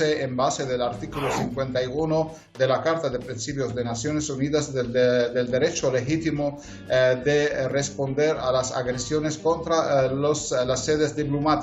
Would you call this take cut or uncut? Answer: uncut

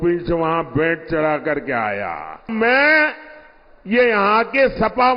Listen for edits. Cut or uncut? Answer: cut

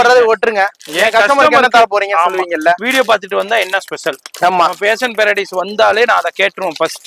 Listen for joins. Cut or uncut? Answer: uncut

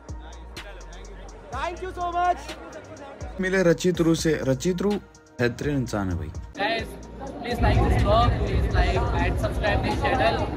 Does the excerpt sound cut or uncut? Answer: cut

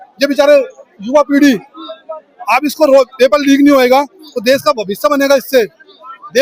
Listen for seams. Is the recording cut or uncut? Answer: uncut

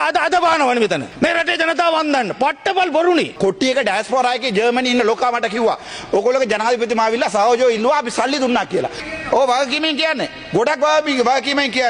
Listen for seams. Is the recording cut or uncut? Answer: cut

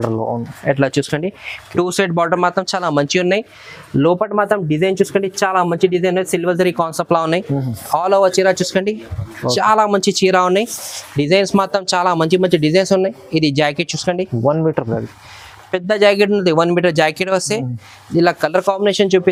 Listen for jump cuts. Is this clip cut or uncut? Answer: uncut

